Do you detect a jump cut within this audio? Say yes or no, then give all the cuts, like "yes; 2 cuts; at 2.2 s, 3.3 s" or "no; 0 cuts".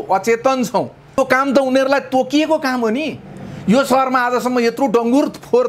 yes; 1 cut; at 1.2 s